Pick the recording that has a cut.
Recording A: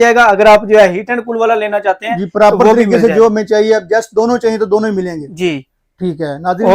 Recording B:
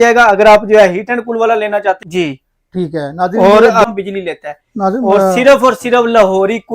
B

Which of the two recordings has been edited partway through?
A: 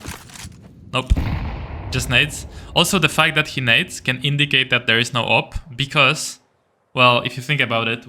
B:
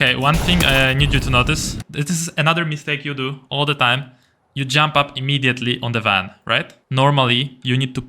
B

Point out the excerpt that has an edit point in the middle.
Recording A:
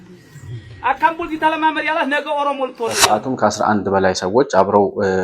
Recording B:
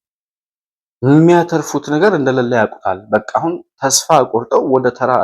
A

